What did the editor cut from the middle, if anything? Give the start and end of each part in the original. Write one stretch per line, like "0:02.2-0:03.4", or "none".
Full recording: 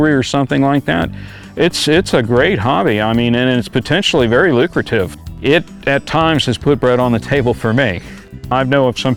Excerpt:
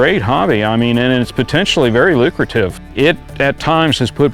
0:05.2-0:05.3